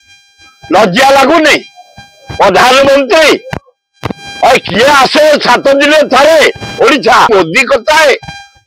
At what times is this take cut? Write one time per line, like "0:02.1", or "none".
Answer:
0:07.3